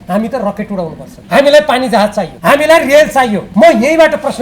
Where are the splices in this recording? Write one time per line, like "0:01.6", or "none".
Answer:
0:01.1
0:02.3
0:03.4